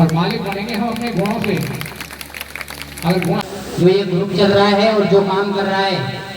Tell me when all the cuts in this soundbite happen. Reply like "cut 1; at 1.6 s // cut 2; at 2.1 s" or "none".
cut 1; at 3.2 s

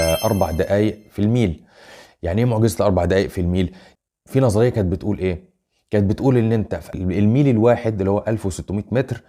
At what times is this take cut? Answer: cut 1; at 3.8 s

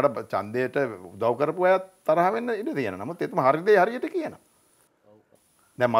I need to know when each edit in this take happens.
none

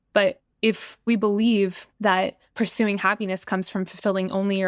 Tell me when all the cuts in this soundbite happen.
cut 1; at 1.0 s // cut 2; at 2.1 s

